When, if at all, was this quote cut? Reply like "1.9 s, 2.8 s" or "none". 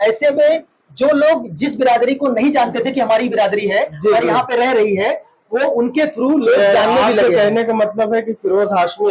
none